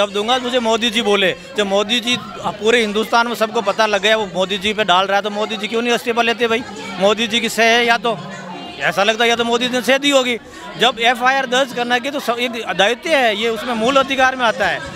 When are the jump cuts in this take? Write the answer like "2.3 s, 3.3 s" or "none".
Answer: none